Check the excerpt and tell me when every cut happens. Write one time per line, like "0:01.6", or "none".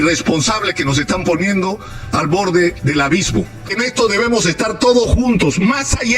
0:03.7